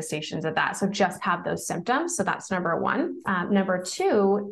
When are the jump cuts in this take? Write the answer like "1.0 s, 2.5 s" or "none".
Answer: 3.2 s